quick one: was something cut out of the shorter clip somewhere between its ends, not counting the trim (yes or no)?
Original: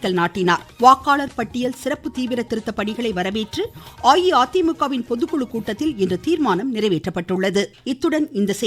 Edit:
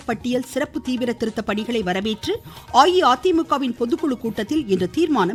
no